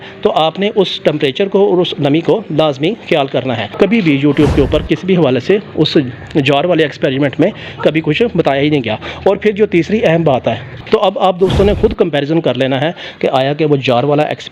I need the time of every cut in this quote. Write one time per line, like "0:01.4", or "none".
0:03.7
0:10.7